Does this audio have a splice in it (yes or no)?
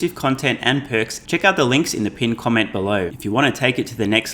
yes